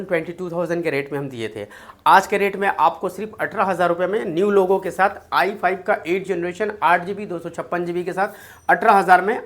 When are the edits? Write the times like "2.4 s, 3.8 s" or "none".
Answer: none